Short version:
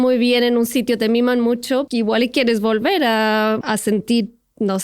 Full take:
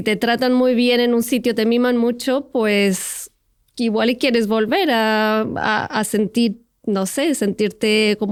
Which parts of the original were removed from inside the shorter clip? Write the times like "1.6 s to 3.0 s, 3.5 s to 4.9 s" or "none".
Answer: 2.5 s to 3.8 s, 5.5 s to 5.9 s